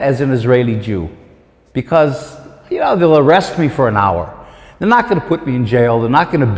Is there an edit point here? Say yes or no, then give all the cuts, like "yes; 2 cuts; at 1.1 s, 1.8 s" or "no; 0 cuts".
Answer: no; 0 cuts